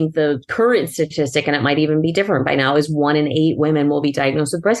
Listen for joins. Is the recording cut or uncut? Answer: uncut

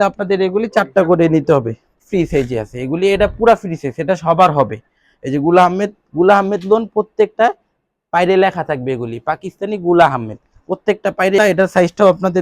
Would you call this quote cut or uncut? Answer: cut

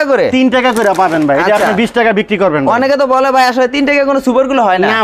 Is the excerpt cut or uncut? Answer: uncut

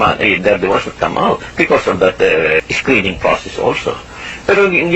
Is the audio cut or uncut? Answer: cut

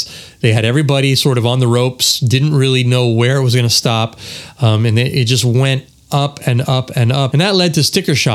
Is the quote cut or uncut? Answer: cut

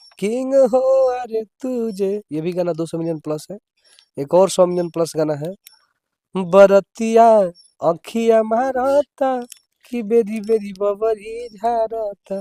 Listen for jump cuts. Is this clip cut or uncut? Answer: uncut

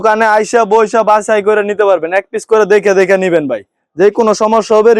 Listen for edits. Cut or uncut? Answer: uncut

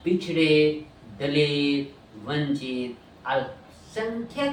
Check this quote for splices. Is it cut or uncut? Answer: uncut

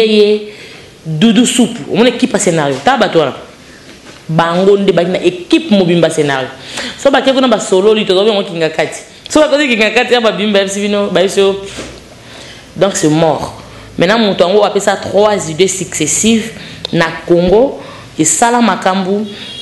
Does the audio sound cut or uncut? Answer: uncut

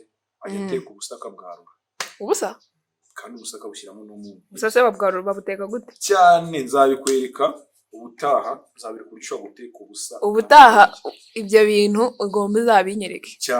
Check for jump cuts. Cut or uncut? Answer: uncut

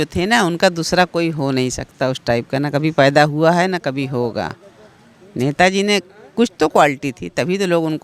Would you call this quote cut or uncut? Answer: uncut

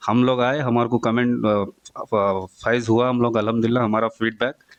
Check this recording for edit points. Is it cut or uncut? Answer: uncut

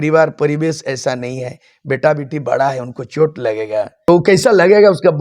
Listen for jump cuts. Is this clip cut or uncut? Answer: cut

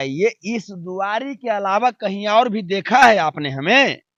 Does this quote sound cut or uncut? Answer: uncut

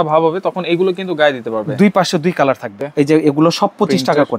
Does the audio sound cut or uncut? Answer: cut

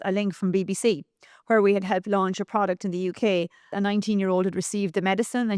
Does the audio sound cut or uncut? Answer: cut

